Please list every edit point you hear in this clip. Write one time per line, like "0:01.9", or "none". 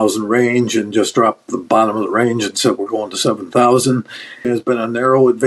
0:04.5